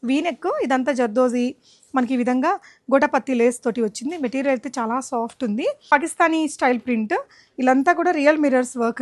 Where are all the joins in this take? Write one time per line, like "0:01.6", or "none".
0:05.8